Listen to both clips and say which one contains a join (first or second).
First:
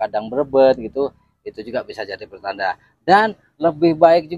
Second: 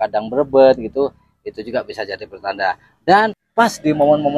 second